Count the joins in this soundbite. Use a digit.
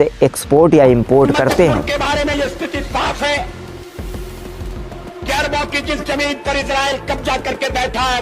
1